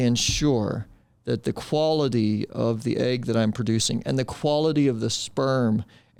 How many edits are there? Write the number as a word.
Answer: zero